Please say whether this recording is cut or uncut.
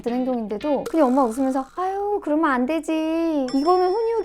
uncut